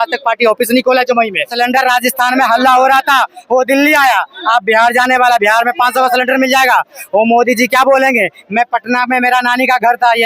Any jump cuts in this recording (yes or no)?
yes